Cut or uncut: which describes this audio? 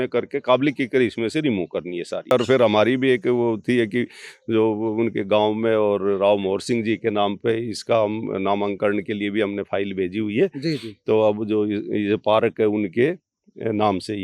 cut